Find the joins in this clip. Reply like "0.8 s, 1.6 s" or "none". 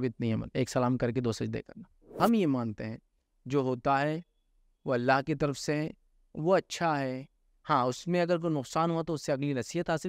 2.2 s